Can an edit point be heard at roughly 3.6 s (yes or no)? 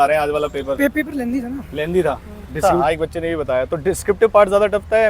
no